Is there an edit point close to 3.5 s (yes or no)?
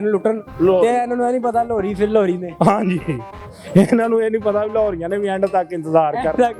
no